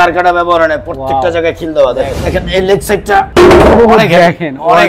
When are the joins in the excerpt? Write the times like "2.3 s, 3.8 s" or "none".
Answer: 2.2 s